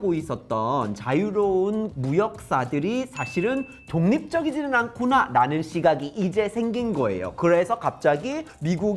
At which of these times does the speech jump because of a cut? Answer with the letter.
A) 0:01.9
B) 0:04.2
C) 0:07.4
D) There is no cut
A